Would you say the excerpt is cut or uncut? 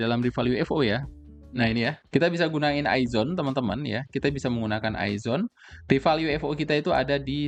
uncut